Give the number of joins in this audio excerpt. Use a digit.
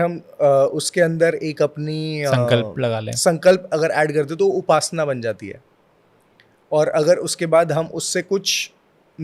0